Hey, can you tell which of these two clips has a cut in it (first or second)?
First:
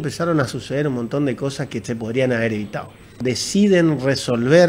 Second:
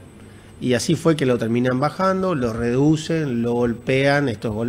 first